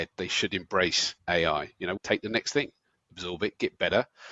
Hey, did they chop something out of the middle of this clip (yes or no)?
yes